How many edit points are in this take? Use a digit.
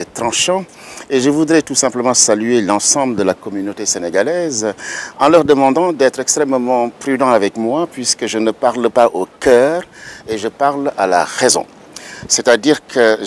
1